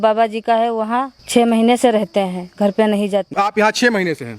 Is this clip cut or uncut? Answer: cut